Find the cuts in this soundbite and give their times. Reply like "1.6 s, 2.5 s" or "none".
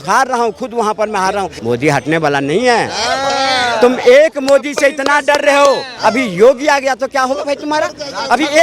1.5 s, 5.9 s